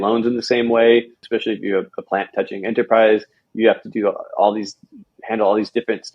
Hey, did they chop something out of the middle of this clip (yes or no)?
yes